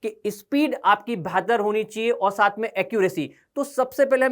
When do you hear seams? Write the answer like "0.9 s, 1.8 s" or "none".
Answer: none